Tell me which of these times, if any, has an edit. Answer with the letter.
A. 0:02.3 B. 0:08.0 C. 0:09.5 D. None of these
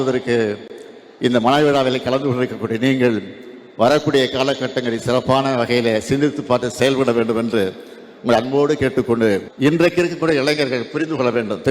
C